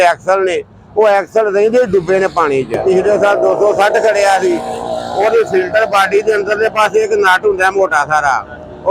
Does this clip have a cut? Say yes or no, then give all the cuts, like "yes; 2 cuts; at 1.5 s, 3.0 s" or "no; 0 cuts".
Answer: yes; 1 cut; at 2.8 s